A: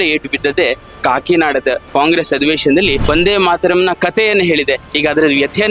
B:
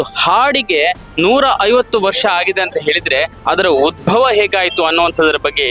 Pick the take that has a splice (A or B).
A